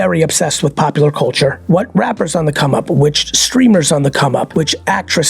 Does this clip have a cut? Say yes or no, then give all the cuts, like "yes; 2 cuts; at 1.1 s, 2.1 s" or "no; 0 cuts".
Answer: yes; 2 cuts; at 1.6 s, 4.5 s